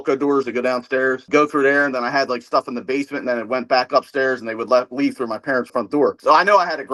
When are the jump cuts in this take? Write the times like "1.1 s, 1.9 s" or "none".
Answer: none